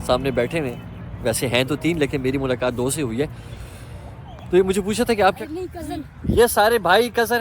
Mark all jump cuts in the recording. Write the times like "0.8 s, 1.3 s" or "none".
5.4 s